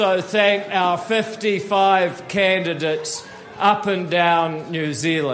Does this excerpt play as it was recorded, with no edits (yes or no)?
yes